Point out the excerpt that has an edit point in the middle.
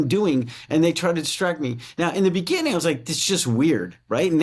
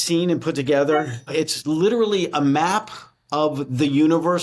second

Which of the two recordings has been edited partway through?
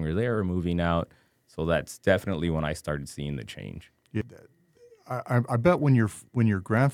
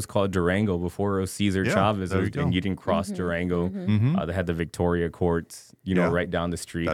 first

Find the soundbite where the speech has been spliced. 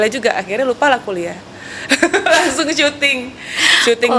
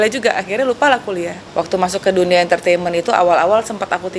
second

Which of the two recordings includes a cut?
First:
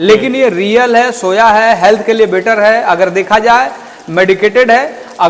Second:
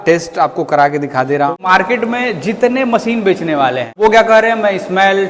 second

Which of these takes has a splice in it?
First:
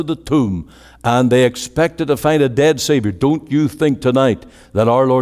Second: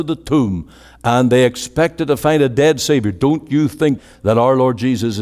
second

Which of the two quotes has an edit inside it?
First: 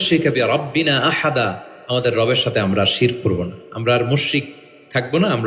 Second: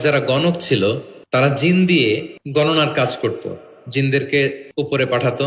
second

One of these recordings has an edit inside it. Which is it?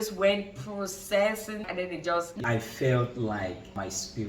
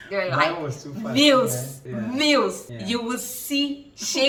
first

